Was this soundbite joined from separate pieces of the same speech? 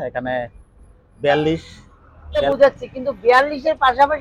yes; 1 cut; at 2.5 s

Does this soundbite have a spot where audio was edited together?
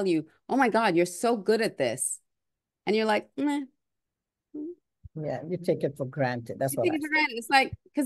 no; 0 cuts

